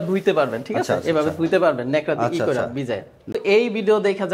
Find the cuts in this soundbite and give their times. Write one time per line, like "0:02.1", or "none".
0:03.3